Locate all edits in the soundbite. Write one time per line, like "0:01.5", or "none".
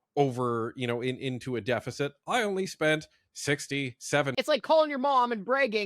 0:04.3